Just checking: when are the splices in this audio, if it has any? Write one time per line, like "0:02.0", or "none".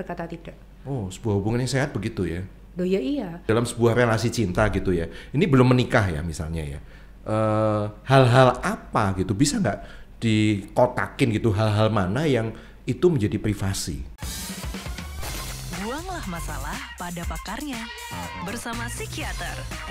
0:03.5
0:14.1